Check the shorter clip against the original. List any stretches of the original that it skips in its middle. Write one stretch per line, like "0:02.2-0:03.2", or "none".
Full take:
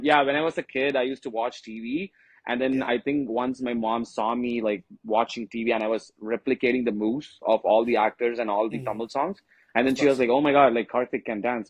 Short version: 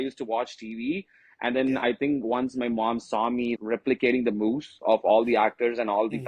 0:04.6-0:06.1